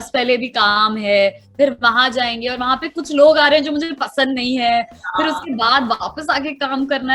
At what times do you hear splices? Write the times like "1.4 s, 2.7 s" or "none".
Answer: none